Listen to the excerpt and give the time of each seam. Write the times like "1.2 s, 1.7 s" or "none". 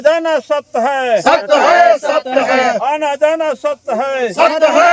none

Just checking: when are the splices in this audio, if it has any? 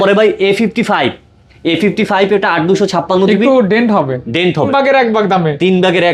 4.7 s

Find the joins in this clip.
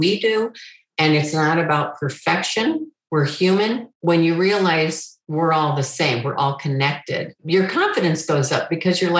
3.9 s

